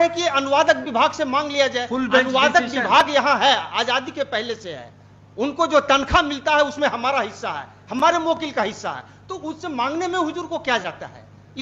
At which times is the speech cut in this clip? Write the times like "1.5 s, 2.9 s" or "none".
none